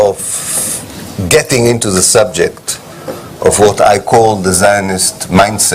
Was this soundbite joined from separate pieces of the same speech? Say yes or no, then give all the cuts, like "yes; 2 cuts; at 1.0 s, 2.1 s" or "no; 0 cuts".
yes; 1 cut; at 2.4 s